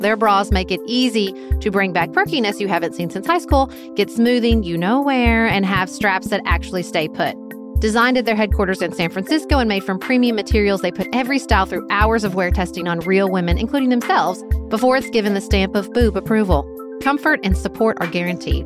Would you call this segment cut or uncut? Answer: uncut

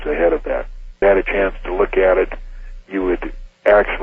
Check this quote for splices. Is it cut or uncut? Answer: cut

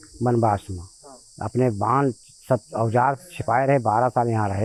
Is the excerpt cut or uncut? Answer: uncut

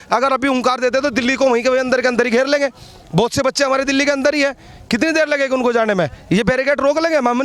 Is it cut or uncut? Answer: uncut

